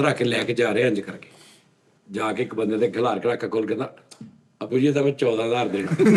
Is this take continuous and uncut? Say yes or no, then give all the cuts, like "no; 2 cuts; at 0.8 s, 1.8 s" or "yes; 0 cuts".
yes; 0 cuts